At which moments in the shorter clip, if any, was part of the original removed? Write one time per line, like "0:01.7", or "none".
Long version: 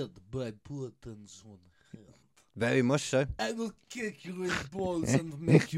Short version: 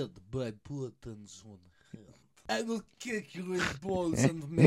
0:02.4